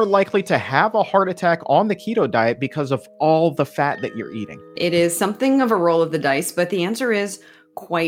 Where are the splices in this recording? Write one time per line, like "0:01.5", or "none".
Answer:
0:04.8